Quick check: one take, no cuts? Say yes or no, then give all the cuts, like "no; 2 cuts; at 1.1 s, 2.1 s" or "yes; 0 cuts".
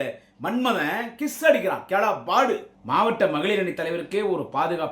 no; 1 cut; at 2.7 s